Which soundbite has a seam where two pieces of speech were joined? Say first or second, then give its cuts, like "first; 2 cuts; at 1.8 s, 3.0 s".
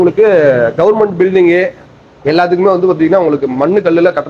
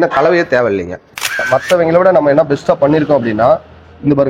second; 1 cut; at 1.4 s